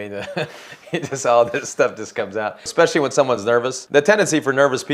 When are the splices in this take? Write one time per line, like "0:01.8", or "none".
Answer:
0:02.7
0:03.8